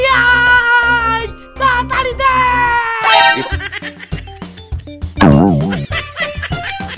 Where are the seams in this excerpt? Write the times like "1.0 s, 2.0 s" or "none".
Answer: none